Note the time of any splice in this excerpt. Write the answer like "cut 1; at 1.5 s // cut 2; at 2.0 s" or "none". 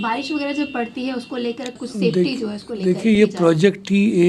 cut 1; at 1.8 s